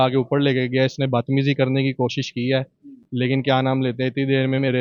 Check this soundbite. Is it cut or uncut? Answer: uncut